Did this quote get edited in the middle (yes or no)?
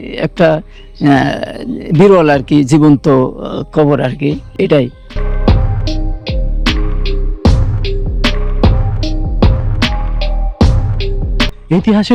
no